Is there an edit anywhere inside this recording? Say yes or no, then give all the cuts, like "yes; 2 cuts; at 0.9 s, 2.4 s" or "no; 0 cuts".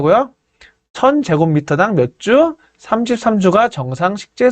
no; 0 cuts